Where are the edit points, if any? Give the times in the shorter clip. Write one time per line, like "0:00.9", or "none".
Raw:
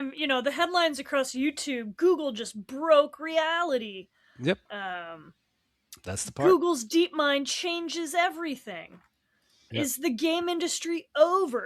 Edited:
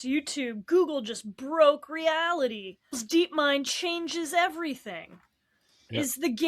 0:03.0